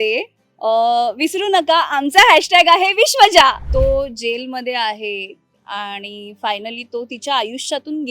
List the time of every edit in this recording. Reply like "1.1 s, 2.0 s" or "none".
3.6 s